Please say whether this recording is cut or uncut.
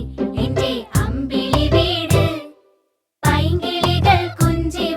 cut